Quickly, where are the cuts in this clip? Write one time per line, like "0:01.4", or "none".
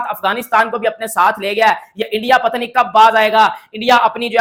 none